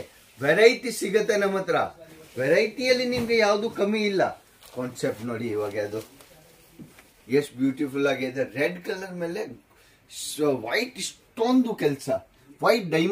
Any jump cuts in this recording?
no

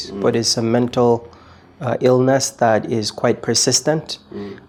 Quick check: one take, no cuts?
yes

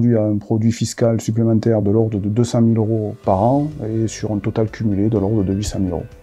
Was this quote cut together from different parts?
no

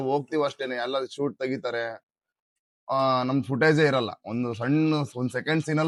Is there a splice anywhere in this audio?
no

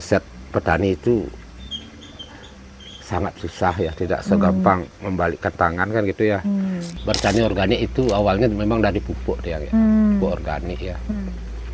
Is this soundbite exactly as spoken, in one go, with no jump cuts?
no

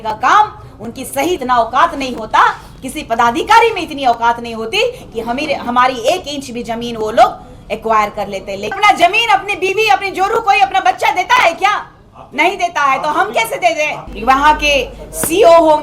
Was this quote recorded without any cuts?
no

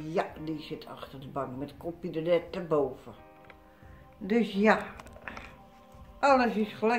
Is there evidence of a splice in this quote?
no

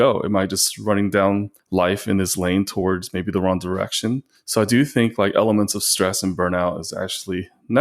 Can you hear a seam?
yes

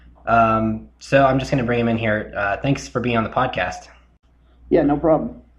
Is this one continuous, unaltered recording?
no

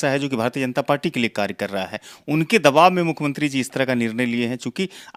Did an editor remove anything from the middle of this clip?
no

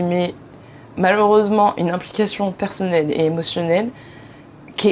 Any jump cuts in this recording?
no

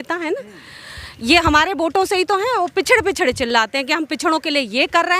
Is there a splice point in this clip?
no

